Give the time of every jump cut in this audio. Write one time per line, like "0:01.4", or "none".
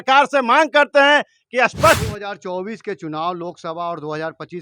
0:02.0

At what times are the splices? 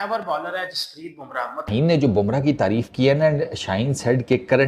0:01.7

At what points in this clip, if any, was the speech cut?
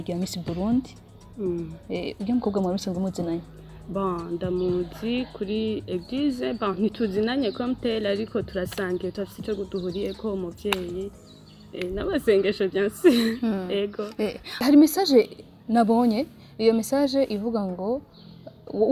none

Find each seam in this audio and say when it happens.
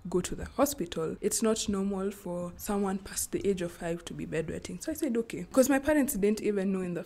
0:01.1
0:02.5
0:05.5

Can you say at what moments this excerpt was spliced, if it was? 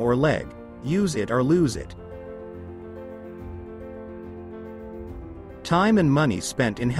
0:01.9
0:04.0
0:05.5

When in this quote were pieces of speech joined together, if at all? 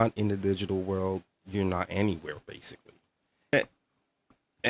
0:03.5

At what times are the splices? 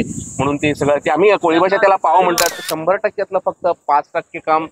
0:02.8

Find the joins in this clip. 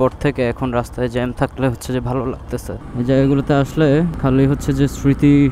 0:02.8

